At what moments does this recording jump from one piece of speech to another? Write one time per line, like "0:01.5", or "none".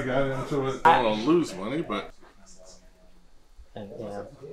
0:00.8
0:02.2